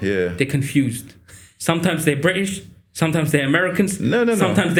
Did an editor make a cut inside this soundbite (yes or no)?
no